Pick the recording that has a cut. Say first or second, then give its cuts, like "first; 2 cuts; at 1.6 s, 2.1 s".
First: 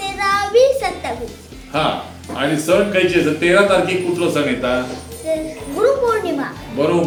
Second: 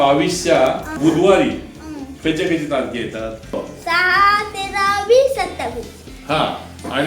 second; 2 cuts; at 1.0 s, 3.5 s